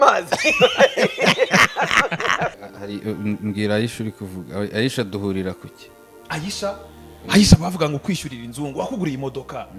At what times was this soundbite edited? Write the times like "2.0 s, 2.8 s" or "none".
2.5 s